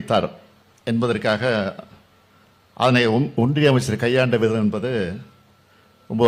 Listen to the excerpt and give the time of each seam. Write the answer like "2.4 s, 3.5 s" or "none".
none